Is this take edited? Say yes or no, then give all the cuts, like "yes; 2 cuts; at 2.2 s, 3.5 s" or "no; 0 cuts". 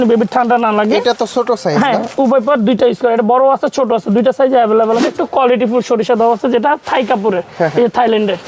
yes; 1 cut; at 5.0 s